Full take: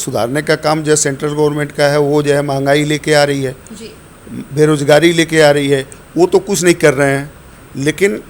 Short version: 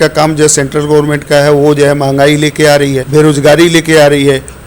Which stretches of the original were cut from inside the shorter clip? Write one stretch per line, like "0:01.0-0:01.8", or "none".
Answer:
0:03.5-0:04.5

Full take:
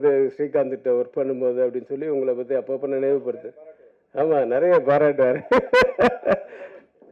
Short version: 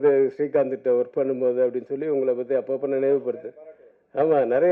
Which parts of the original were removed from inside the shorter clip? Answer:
none

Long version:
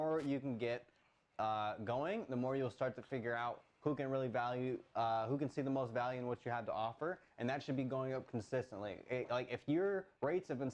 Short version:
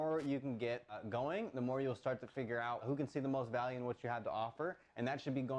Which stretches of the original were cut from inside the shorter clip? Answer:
0:01.0-0:01.7
0:03.6-0:05.3

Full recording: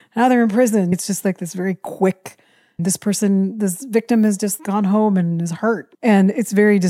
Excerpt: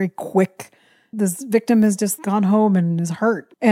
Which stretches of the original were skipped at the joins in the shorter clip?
0:02.8-0:03.5

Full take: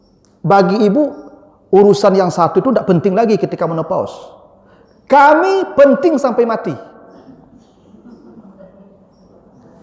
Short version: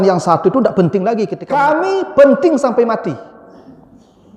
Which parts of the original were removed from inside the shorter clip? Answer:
0:03.5-0:05.0

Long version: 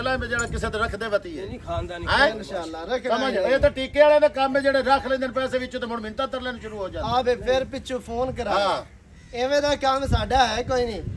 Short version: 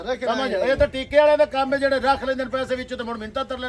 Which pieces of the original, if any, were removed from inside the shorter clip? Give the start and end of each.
none

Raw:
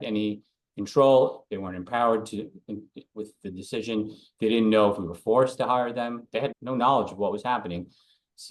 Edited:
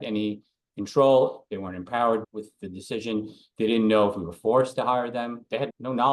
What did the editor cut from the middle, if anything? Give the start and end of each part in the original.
0:02.3-0:03.1

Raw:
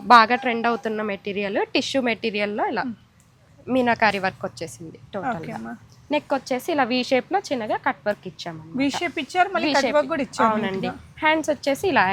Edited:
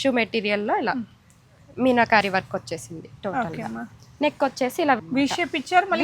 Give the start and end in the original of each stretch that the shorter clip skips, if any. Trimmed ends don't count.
0:06.9-0:08.6

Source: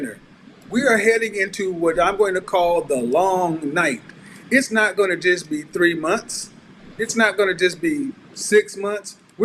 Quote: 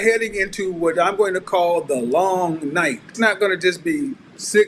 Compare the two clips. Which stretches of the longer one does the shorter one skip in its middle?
0:04.1-0:07.0

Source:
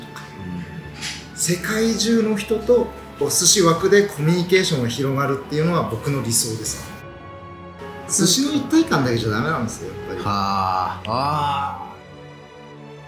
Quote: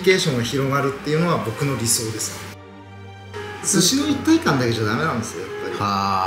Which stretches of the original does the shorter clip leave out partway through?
none

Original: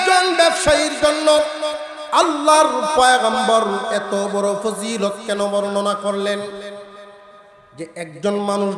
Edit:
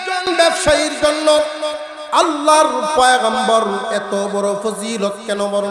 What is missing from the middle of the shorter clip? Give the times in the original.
none

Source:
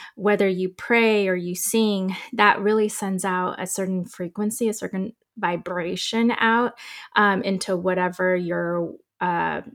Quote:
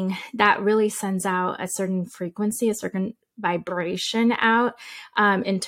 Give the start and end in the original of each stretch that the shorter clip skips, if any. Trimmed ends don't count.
none

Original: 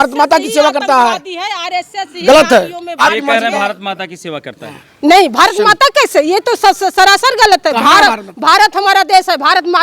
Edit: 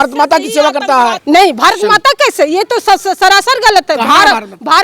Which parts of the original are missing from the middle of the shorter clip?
0:01.2-0:04.9

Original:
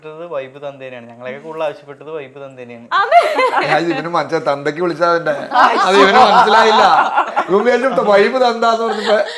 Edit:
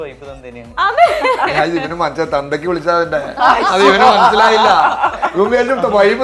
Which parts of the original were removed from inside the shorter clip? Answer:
none

